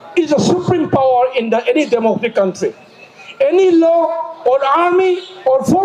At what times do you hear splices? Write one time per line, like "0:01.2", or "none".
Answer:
0:01.4